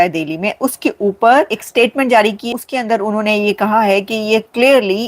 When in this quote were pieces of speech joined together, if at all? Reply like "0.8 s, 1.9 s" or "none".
1.6 s, 2.5 s